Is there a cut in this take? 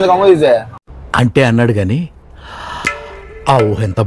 no; 0 cuts

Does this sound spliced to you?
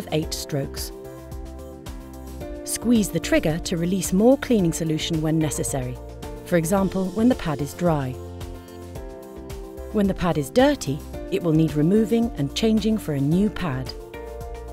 yes; 1 cut; at 13.8 s

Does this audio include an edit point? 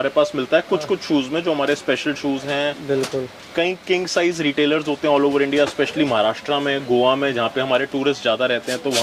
no; 0 cuts

